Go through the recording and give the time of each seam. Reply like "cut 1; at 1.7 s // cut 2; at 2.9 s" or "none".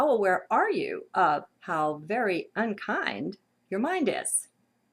cut 1; at 1.5 s